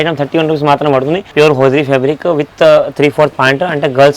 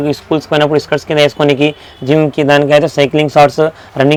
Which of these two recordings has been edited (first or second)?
first